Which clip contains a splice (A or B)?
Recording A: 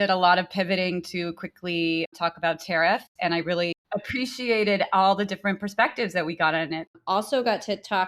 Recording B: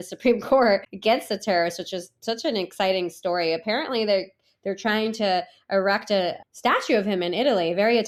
A